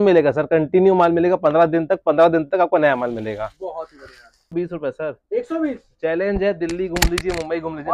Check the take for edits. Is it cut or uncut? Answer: cut